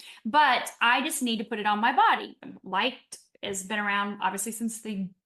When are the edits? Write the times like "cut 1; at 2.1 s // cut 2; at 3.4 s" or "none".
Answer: cut 1; at 2.4 s